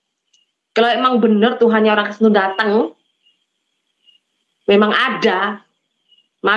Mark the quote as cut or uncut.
uncut